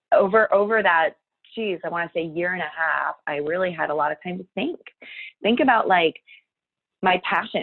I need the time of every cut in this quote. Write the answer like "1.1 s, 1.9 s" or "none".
none